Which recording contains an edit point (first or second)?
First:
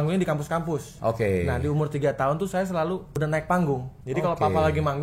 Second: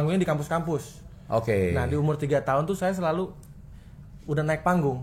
first